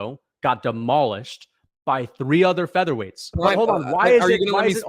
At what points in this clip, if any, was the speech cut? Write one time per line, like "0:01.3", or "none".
0:03.3